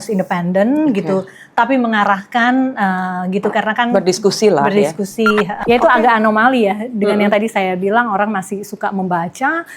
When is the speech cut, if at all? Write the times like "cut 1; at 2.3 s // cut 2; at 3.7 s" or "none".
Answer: cut 1; at 5.6 s